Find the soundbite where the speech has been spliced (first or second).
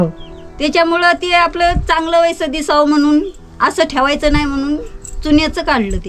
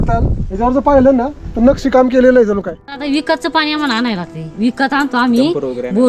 second